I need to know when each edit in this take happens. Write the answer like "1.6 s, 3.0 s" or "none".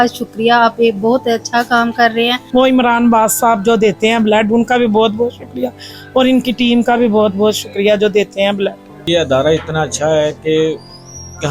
2.4 s, 9.1 s